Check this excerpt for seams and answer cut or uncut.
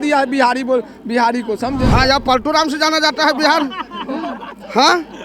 cut